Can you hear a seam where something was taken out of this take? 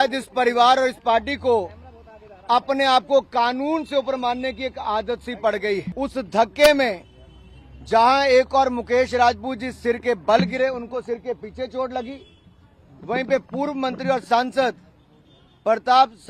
yes; 1 cut; at 5.9 s

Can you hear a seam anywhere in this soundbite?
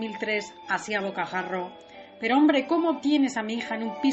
no; 0 cuts

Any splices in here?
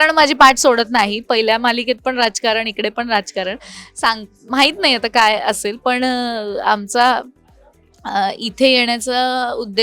no; 0 cuts

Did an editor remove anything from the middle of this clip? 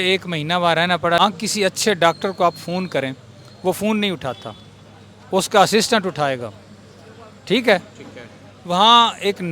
yes; 1 cut; at 1.2 s

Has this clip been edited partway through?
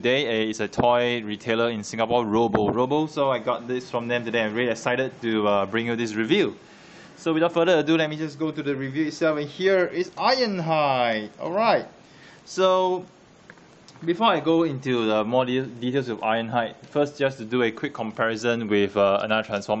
yes; 1 cut; at 14.9 s

